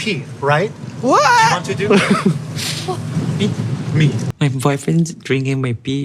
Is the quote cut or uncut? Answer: cut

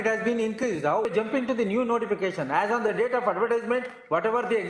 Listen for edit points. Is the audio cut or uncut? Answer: cut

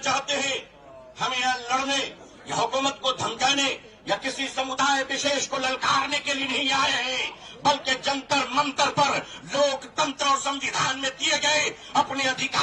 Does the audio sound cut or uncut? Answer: uncut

